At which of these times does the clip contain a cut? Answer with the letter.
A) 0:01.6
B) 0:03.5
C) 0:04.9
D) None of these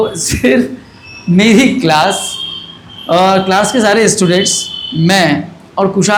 D